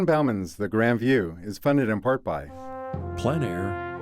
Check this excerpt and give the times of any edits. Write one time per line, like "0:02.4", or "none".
0:02.5